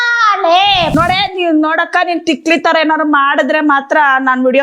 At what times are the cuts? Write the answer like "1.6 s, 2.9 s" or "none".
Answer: 0.9 s